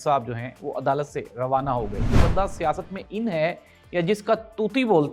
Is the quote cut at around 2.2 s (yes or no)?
yes